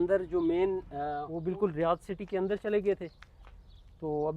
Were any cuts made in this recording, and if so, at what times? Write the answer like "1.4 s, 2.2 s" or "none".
1.3 s